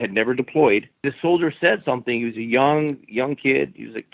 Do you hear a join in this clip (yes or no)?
yes